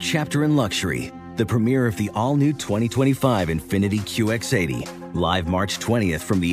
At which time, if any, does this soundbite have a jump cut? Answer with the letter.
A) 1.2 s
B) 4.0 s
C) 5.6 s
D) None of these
D